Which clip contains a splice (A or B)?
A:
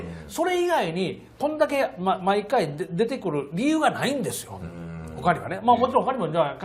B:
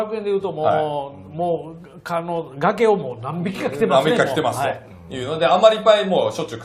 A